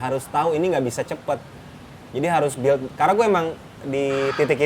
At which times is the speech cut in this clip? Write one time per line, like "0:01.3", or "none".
none